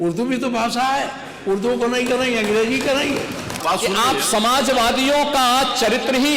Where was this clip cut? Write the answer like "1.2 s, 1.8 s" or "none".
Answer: 3.5 s